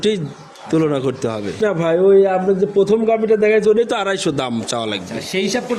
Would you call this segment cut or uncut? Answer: uncut